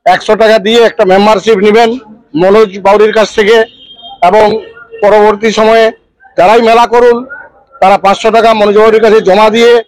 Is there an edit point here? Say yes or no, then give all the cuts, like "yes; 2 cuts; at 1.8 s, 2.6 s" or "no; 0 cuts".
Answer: no; 0 cuts